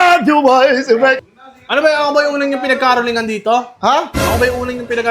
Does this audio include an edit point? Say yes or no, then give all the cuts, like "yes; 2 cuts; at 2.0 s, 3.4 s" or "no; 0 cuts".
yes; 1 cut; at 1.2 s